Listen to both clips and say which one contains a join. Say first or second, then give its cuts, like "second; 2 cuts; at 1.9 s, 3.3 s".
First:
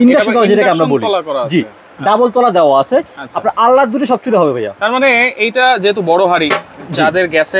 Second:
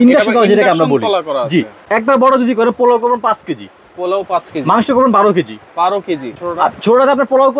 second; 2 cuts; at 1.8 s, 6.3 s